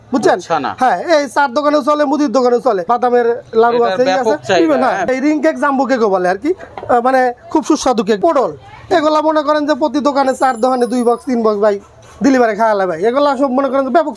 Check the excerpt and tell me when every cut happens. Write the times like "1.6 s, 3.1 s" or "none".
2.8 s, 5.1 s, 8.2 s